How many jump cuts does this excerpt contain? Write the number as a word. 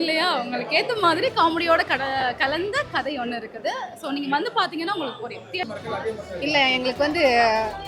one